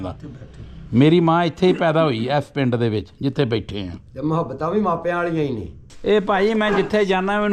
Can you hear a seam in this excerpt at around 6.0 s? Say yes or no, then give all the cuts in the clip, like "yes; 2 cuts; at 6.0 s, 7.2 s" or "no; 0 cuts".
yes; 1 cut; at 6.0 s